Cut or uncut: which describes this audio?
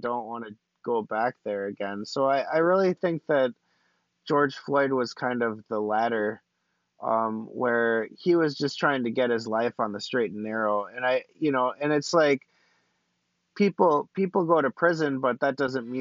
uncut